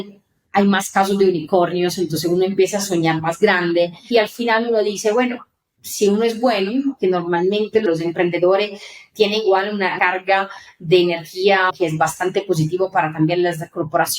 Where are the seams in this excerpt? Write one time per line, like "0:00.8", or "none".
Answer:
0:04.0
0:07.9
0:09.9
0:11.7